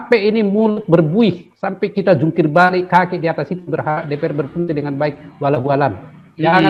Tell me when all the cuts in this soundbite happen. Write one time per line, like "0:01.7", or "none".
none